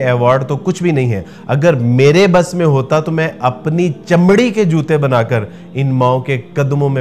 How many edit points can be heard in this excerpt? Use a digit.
0